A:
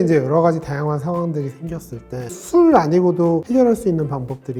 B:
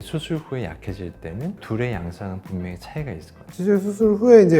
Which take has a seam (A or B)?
B